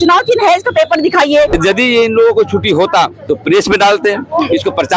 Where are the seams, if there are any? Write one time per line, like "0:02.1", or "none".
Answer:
0:01.5